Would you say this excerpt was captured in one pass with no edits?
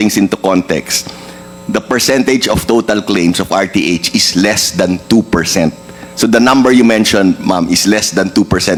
yes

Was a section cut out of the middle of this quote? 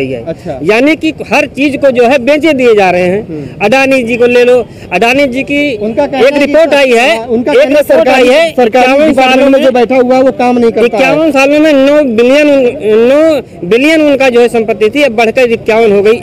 no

